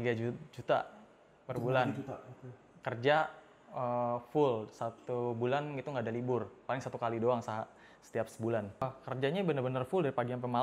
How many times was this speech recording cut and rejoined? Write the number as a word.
one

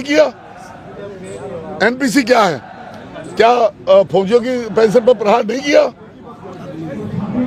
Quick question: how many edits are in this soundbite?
zero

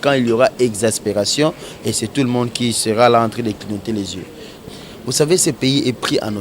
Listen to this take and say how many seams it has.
one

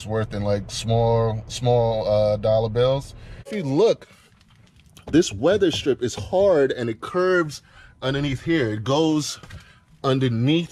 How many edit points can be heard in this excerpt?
one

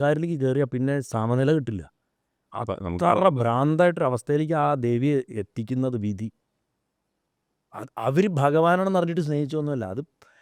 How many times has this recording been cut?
zero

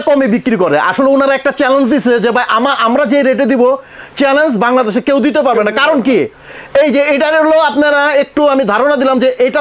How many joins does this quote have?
zero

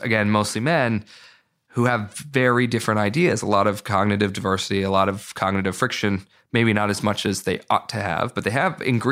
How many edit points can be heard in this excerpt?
zero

